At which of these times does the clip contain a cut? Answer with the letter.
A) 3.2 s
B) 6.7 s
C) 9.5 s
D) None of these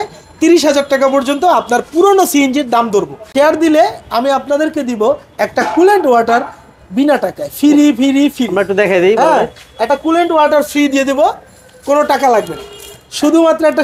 A